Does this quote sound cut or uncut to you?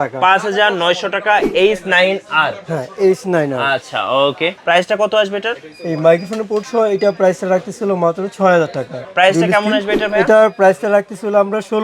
cut